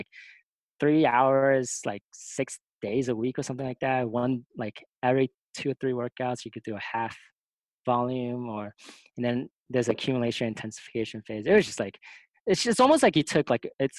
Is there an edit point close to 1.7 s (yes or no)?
no